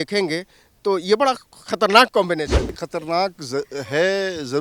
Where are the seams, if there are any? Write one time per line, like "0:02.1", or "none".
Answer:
0:02.8

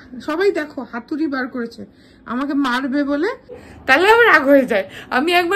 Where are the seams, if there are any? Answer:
0:03.7

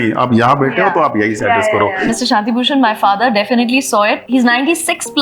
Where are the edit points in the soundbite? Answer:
0:02.1
0:04.2

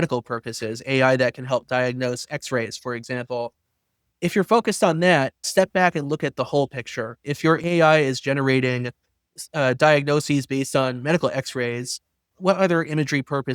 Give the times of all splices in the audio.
0:05.4
0:12.4

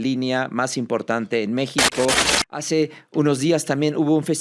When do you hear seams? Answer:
0:02.3

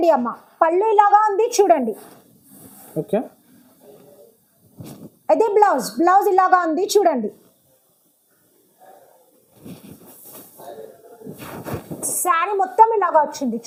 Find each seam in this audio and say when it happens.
none

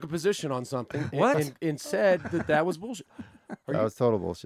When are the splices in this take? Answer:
none

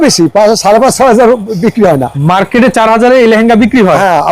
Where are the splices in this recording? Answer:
0:02.1

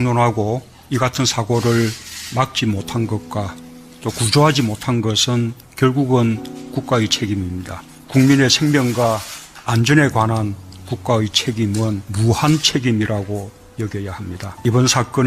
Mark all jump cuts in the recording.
0:04.6

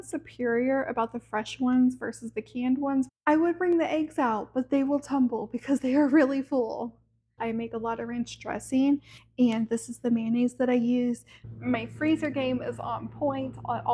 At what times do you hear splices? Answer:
0:03.1
0:07.4
0:11.3

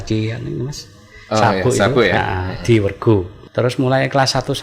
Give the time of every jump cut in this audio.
0:03.4

